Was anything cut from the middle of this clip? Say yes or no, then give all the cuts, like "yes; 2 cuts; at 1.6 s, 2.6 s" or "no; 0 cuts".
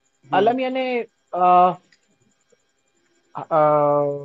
no; 0 cuts